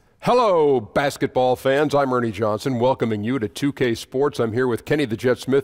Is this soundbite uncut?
yes; 0 cuts

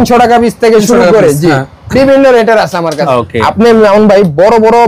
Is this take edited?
yes; 1 cut; at 3.0 s

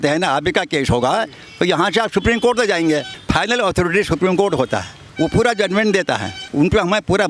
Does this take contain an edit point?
yes; 3 cuts; at 3.1 s, 5.0 s, 6.4 s

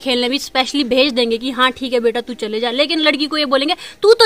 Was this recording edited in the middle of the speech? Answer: no; 0 cuts

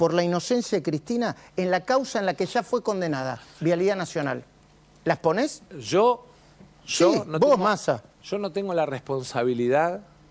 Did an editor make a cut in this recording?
no; 0 cuts

